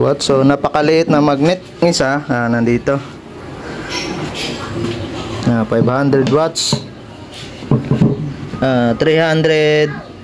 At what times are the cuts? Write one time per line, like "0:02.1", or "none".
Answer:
0:01.8